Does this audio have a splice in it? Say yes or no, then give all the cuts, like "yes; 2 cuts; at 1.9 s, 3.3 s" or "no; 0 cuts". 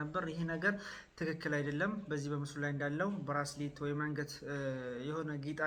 no; 0 cuts